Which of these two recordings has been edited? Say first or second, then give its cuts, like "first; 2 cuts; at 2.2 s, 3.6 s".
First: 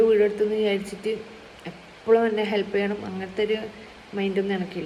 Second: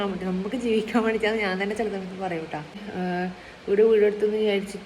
second; 1 cut; at 2.8 s